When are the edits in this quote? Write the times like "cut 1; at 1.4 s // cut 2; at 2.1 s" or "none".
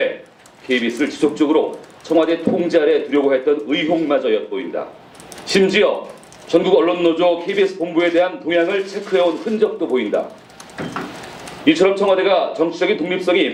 none